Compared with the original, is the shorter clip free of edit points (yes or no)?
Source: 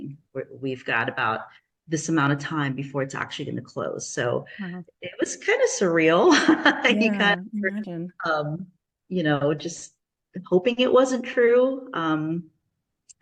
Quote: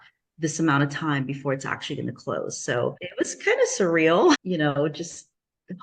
no